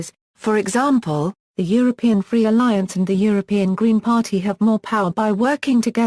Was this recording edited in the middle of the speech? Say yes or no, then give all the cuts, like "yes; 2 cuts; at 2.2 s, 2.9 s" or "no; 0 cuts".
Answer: yes; 1 cut; at 1.7 s